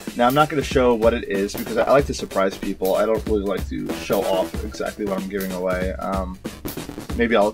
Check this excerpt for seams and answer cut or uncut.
cut